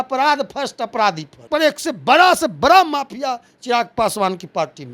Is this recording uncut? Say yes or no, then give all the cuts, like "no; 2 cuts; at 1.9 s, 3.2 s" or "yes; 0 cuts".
no; 1 cut; at 1.5 s